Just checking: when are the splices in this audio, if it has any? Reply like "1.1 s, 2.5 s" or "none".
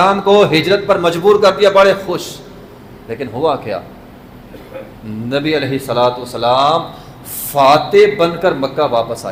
none